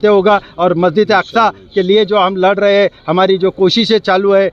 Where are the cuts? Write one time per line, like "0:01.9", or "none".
none